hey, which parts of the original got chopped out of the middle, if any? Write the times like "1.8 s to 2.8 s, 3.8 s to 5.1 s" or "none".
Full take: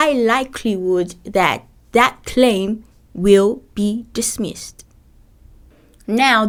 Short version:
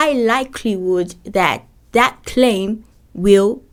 none